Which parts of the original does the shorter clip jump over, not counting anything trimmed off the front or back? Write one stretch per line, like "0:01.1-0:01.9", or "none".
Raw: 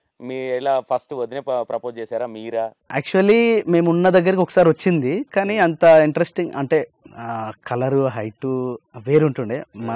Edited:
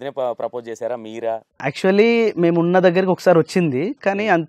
none